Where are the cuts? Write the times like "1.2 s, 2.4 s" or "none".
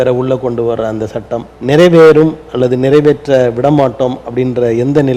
1.5 s